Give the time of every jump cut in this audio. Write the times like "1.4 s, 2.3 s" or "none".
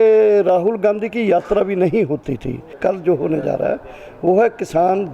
2.7 s